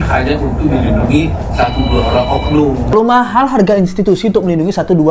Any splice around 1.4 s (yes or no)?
no